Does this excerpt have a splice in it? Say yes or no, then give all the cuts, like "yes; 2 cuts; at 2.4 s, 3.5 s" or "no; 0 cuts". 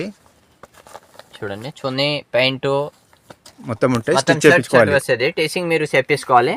no; 0 cuts